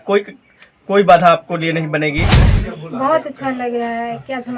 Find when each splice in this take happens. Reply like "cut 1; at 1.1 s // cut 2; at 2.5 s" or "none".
cut 1; at 2.3 s